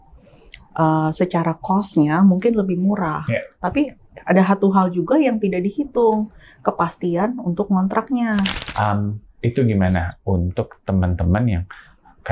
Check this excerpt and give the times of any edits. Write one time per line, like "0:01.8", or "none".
0:08.6